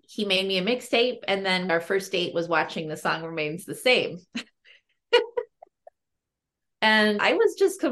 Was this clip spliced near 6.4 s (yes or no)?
no